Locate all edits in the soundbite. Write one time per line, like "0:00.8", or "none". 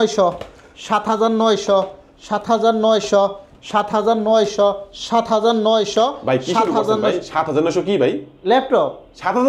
none